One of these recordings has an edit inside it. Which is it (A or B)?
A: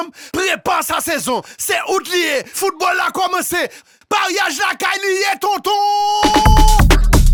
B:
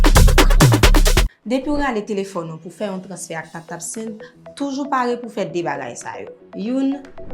B